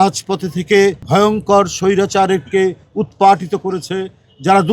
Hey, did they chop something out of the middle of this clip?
yes; 1 cut; at 1.0 s

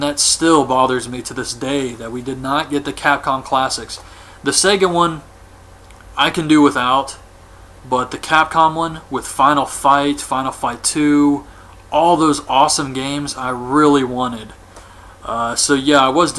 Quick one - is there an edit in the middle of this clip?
no; 0 cuts

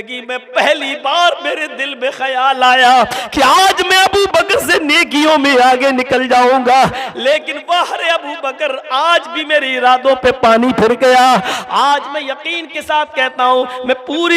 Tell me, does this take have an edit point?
no; 0 cuts

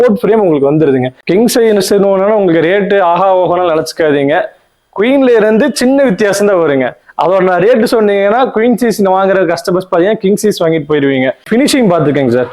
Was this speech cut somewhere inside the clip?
yes; 2 cuts; at 1.1 s, 11.4 s

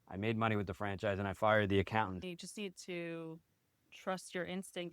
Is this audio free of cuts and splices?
no; 1 cut; at 2.2 s

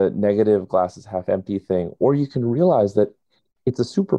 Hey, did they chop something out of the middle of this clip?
no; 0 cuts

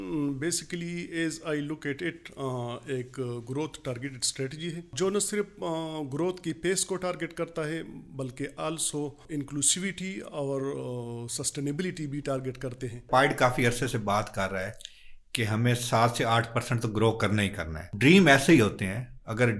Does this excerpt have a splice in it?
yes; 4 cuts; at 4.9 s, 9.2 s, 13.0 s, 17.9 s

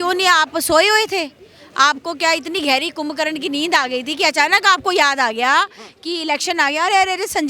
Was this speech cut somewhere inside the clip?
no; 0 cuts

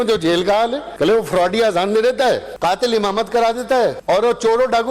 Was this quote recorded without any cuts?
no; 3 cuts; at 0.8 s, 2.5 s, 4.0 s

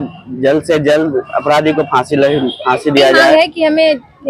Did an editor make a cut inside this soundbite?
yes; 1 cut; at 3.3 s

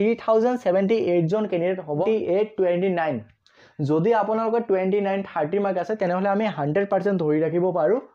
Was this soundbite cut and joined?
yes; 1 cut; at 2.0 s

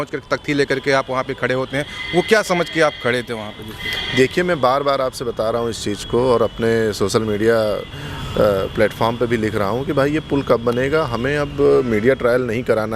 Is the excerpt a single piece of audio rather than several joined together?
yes; 0 cuts

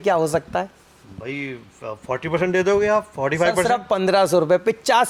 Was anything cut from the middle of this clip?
no; 0 cuts

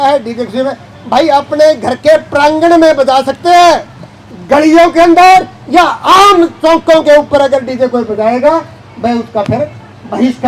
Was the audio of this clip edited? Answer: no; 0 cuts

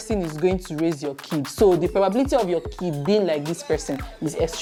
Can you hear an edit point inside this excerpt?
no; 0 cuts

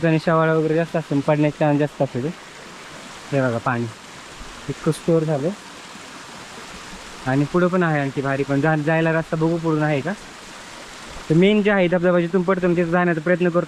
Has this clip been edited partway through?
no; 0 cuts

